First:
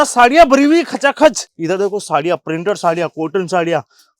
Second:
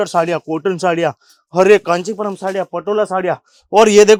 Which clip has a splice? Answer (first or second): first